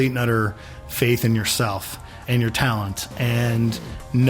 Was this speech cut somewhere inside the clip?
yes; 1 cut; at 2.2 s

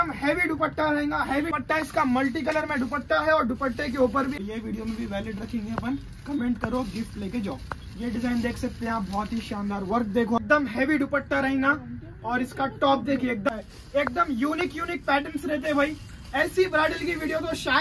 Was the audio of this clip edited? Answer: yes; 4 cuts; at 1.5 s, 4.4 s, 10.4 s, 13.5 s

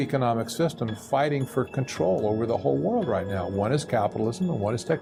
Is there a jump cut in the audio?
no; 0 cuts

